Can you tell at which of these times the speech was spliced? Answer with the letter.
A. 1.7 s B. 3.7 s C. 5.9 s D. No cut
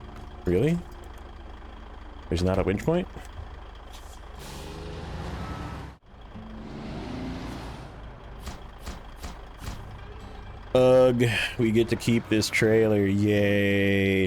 C